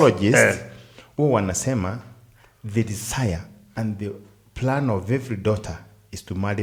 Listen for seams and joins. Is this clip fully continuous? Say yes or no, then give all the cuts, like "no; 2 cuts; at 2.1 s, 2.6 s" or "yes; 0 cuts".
yes; 0 cuts